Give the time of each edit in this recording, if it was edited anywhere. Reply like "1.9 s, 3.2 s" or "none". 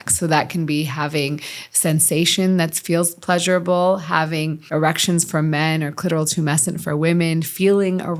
4.6 s

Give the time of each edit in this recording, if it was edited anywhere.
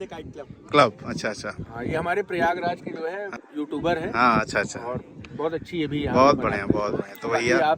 3.3 s

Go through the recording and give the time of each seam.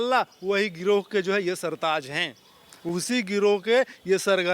none

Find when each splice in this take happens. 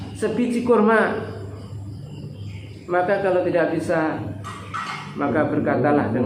none

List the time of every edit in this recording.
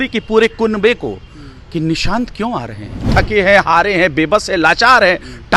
3.1 s

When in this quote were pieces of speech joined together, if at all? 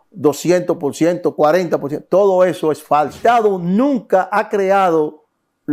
3.2 s

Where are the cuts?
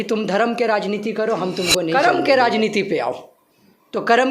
1.9 s

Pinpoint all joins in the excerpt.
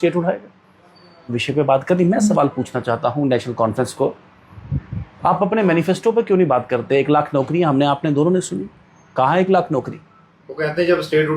1.4 s

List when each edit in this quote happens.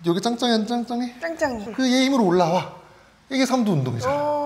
1.6 s

